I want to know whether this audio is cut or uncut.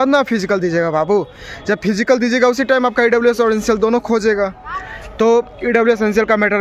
uncut